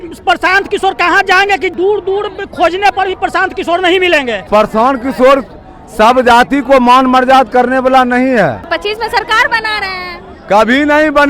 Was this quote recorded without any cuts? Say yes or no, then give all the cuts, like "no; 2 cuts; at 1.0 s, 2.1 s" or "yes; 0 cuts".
no; 3 cuts; at 1.7 s, 4.5 s, 8.7 s